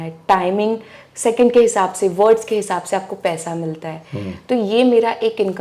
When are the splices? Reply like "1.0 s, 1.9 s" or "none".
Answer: none

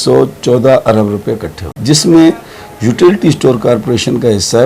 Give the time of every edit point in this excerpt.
1.7 s

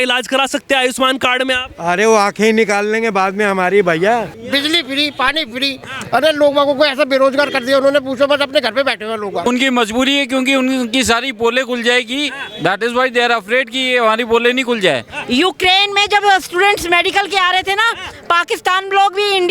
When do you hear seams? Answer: 4.3 s, 9.5 s, 15.1 s

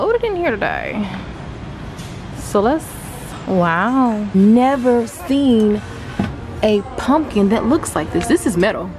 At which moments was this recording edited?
4.3 s

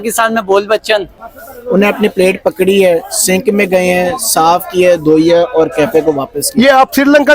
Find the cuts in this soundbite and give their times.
1.2 s

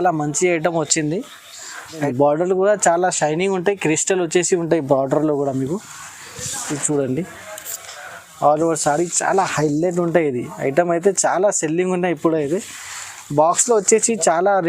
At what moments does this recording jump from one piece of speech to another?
2.0 s

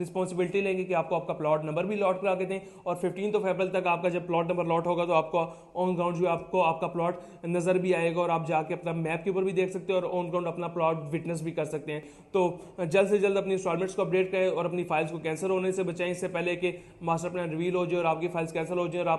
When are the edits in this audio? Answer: 12.1 s

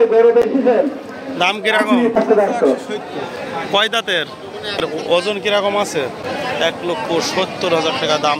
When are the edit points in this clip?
2.2 s, 4.8 s, 6.2 s

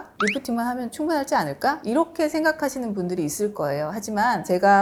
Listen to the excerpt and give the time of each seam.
none

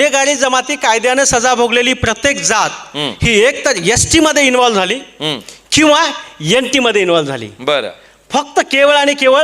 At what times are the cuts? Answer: none

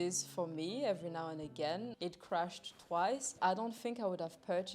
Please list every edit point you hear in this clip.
1.9 s, 3.3 s

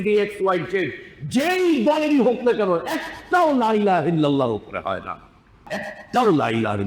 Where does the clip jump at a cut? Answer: 5.7 s

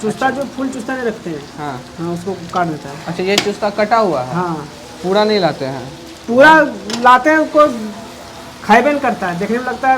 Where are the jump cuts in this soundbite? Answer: none

